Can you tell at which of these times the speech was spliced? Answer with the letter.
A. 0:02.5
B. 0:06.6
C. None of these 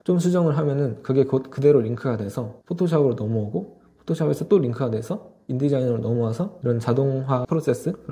C